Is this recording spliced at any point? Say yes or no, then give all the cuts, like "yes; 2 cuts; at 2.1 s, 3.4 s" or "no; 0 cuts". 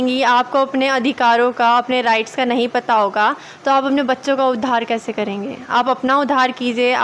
no; 0 cuts